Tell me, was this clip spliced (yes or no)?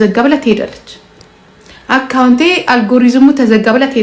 no